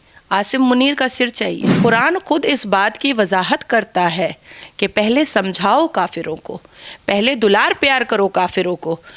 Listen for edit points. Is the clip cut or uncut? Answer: cut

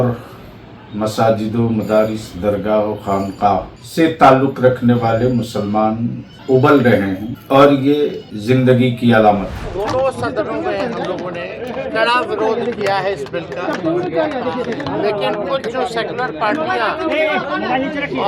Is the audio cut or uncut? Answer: cut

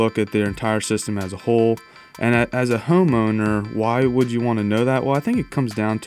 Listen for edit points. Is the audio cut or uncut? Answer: uncut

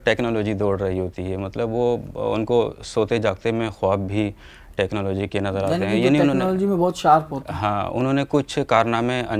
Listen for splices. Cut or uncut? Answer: uncut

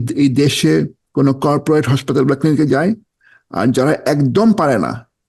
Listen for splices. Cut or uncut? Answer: cut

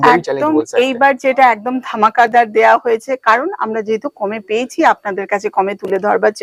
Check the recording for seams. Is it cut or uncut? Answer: uncut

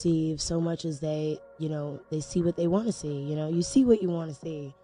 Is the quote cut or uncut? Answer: cut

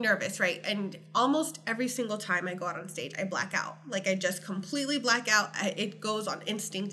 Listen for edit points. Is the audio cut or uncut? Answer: uncut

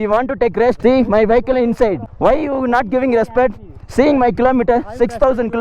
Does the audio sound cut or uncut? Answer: cut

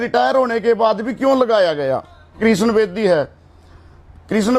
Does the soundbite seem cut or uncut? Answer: cut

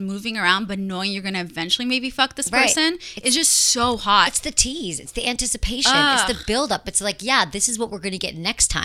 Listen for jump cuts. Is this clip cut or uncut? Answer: uncut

